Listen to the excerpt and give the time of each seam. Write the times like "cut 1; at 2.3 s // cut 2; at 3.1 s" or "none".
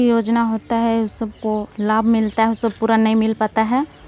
none